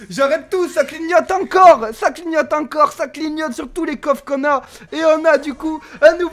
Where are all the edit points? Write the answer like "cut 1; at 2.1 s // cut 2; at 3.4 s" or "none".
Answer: none